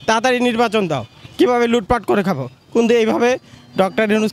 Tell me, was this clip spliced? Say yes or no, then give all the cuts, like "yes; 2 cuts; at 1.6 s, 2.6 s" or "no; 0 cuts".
no; 0 cuts